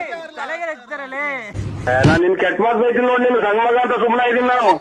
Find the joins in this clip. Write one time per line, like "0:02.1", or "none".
0:01.6